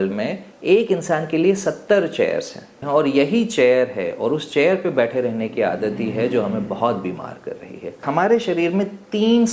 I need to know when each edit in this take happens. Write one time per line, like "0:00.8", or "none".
0:02.8
0:08.1